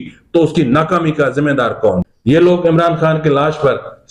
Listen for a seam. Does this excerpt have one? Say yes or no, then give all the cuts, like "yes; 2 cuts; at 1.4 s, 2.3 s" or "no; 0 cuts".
yes; 1 cut; at 2.1 s